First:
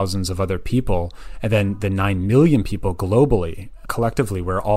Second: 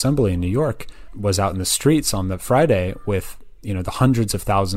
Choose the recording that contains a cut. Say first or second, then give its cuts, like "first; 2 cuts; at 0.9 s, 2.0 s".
first; 1 cut; at 3.8 s